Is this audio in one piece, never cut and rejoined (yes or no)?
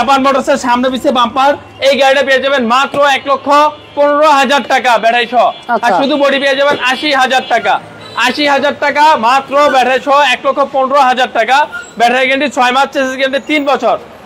yes